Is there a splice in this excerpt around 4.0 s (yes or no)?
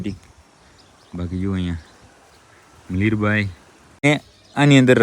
yes